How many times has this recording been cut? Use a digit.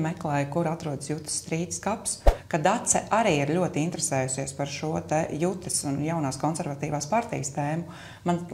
1